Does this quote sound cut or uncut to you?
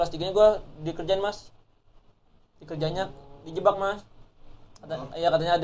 uncut